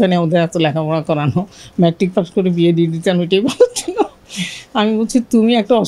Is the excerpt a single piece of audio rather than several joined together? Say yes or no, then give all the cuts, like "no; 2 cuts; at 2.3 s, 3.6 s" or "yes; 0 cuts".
yes; 0 cuts